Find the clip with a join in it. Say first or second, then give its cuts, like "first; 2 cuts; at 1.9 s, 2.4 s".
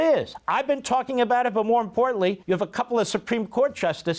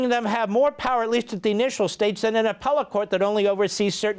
first; 1 cut; at 2.4 s